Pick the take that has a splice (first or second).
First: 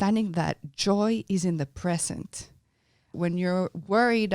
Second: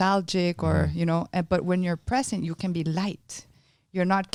first